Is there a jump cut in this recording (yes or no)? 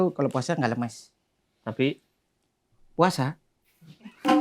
no